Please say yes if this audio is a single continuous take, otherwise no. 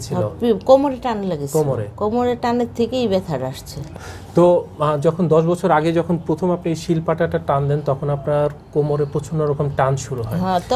yes